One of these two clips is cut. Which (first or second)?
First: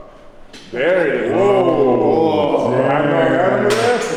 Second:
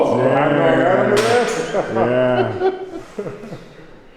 second